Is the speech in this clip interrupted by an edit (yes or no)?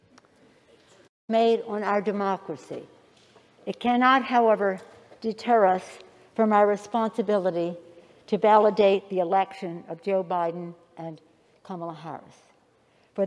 yes